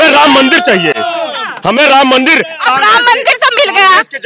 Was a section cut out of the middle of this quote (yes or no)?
no